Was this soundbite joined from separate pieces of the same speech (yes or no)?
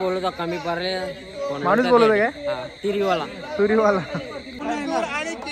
yes